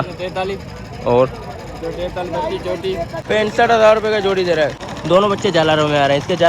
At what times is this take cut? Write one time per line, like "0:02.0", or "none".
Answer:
0:03.2
0:04.9